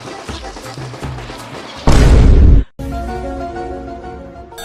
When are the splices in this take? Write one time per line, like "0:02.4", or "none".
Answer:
none